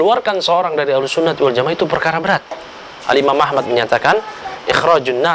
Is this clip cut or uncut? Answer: uncut